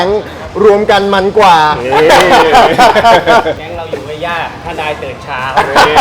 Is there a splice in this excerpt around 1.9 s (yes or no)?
no